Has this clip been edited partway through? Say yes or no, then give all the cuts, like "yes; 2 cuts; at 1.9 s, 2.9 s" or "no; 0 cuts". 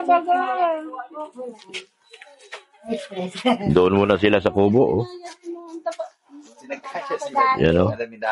no; 0 cuts